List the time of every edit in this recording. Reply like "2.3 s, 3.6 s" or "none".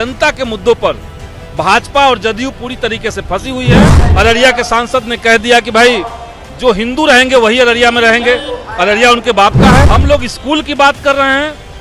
4.0 s, 9.9 s